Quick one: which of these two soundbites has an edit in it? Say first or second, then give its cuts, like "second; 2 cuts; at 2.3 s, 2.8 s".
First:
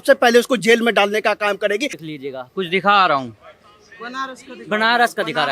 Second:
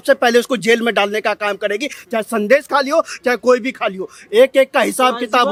first; 1 cut; at 2.0 s